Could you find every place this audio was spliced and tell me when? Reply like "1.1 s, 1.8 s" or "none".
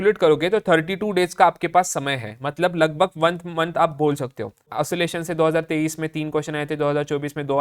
4.7 s